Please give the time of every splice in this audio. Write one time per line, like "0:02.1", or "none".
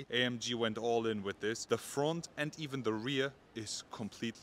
0:01.6

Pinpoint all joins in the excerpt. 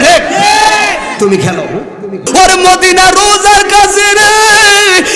0:02.2

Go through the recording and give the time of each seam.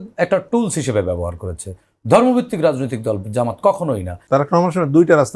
0:04.1

